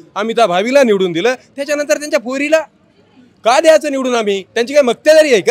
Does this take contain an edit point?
no; 0 cuts

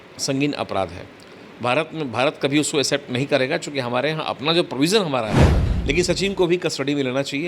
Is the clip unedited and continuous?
no; 1 cut; at 5.7 s

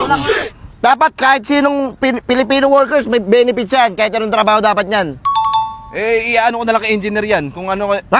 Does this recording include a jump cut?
no; 0 cuts

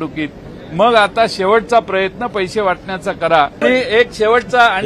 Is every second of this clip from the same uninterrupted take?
no; 1 cut; at 3.6 s

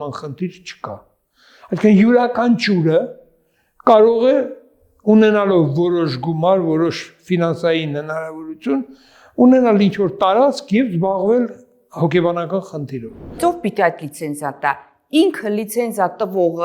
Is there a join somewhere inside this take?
yes; 1 cut; at 13.4 s

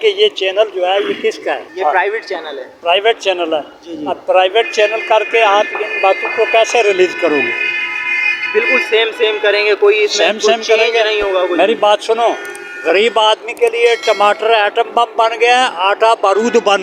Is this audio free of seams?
yes; 0 cuts

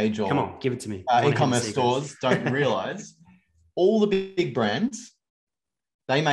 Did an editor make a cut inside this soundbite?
no; 0 cuts

